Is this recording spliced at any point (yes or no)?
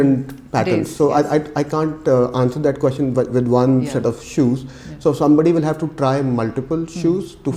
no